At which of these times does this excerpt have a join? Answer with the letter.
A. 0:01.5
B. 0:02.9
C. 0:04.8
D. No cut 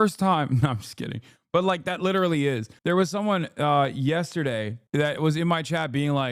C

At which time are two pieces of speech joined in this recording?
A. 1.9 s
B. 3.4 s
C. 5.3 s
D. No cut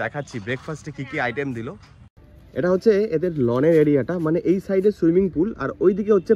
A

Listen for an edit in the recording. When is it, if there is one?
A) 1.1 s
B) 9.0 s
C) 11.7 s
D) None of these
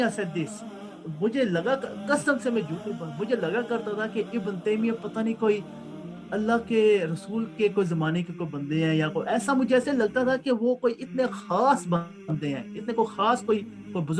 A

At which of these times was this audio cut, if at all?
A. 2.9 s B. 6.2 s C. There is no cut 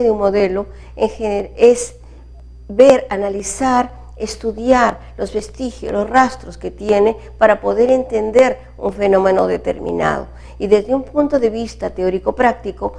C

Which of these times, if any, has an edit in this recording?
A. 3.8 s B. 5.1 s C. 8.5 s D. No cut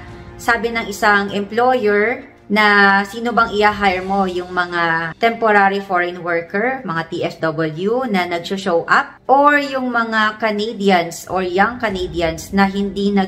D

